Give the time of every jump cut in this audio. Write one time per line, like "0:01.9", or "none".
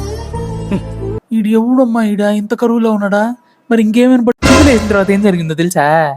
0:04.4

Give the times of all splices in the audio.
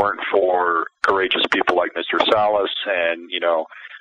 0:00.9

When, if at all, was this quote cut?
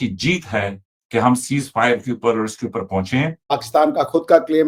0:03.6

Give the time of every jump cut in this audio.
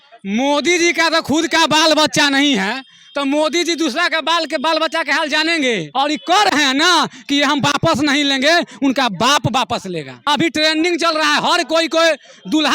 0:05.9
0:10.1

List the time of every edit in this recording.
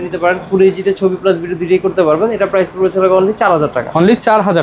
none

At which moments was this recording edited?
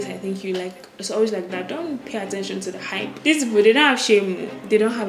0:02.9

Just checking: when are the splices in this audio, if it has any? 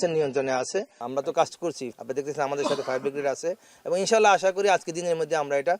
0:01.0
0:01.9

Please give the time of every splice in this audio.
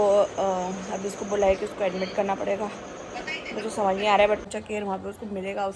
0:04.6

